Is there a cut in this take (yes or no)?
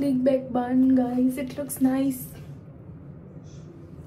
no